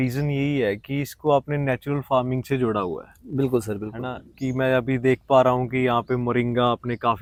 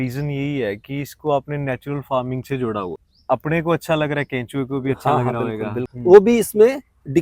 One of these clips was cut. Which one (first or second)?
second